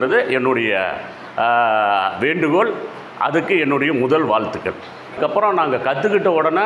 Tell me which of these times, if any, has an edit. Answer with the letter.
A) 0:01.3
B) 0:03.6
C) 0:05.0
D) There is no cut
C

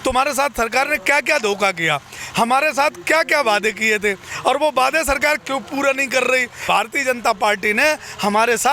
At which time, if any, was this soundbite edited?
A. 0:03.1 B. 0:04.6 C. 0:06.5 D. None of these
C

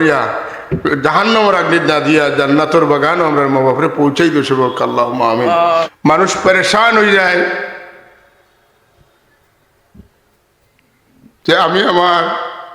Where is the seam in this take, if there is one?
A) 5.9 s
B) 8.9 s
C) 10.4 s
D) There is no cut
A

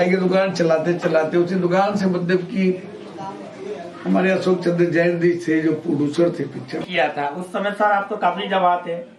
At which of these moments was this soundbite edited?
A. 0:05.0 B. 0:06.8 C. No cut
B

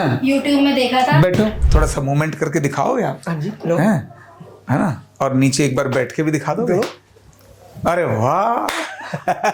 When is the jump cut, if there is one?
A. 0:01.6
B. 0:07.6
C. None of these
A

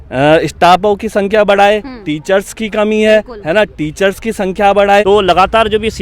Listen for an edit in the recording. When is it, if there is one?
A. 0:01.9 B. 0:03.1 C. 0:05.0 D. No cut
C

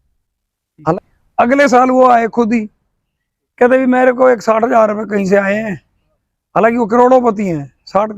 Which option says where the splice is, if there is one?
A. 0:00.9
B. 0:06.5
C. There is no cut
A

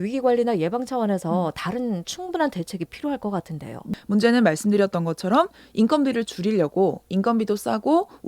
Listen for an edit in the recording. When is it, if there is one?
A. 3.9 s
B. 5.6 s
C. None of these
A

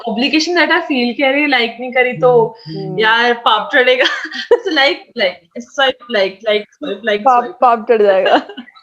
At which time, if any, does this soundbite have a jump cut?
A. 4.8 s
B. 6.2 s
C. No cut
C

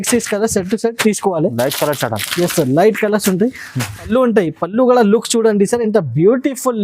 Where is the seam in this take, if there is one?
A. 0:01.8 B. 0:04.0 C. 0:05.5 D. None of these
B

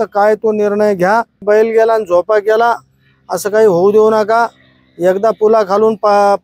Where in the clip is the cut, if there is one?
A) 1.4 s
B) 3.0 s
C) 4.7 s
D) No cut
A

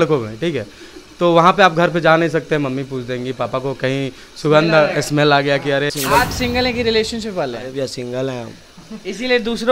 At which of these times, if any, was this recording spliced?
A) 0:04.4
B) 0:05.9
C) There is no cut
B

